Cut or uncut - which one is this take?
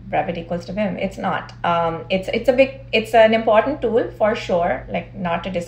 uncut